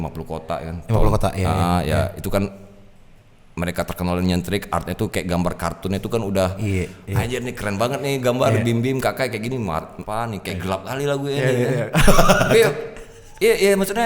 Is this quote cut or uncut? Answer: cut